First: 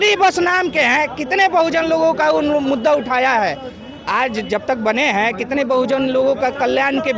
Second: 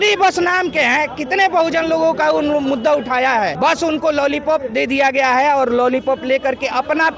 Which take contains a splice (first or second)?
second